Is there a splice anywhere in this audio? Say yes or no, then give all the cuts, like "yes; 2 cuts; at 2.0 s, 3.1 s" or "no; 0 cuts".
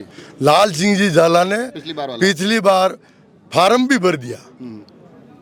no; 0 cuts